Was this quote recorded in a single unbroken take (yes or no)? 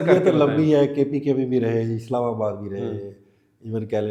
yes